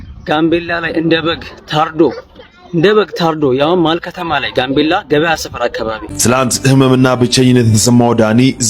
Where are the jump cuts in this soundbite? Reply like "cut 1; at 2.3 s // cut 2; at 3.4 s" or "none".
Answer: cut 1; at 6.1 s